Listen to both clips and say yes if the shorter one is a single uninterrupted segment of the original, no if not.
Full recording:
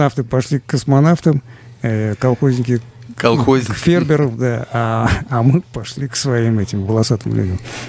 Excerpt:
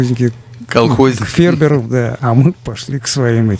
no